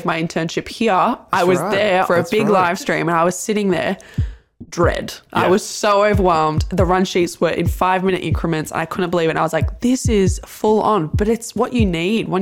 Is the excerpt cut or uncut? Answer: cut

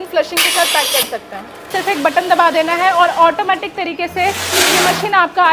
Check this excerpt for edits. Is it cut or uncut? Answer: cut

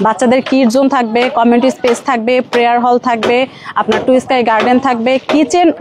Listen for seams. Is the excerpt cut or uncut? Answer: uncut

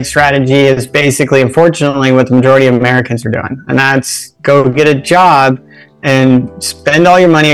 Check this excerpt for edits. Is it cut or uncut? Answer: uncut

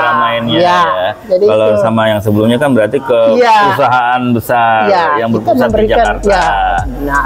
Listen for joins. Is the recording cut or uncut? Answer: uncut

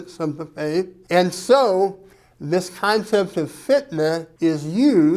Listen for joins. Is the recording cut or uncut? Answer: cut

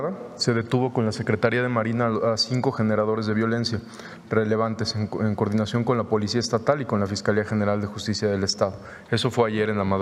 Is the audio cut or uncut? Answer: uncut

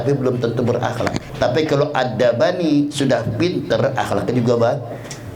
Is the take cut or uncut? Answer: cut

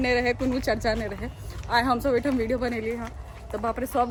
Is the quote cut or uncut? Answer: uncut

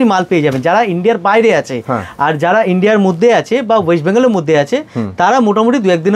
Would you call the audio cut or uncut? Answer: uncut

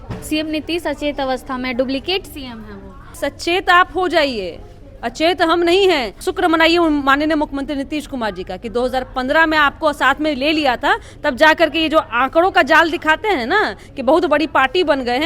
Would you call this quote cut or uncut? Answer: cut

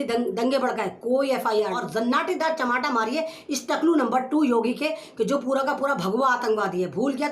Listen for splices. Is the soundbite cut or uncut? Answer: cut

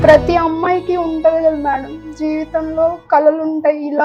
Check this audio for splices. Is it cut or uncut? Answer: uncut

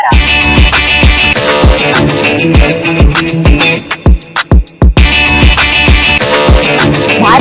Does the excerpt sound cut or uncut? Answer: uncut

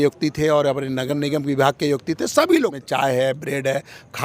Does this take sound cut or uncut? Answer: cut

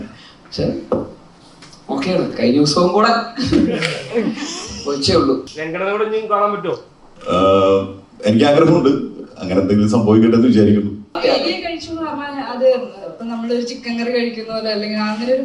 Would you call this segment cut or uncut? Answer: cut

